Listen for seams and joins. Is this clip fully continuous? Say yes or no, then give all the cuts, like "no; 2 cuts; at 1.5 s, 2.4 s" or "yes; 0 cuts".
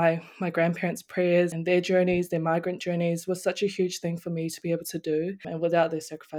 no; 2 cuts; at 1.5 s, 5.4 s